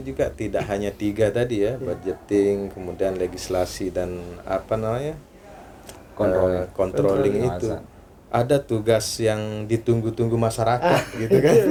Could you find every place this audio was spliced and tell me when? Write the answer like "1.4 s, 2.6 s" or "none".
none